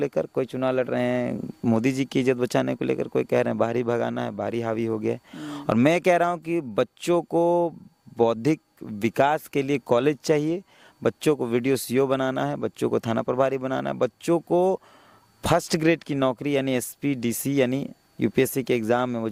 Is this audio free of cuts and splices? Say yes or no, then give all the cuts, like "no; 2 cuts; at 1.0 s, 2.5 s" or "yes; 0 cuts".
yes; 0 cuts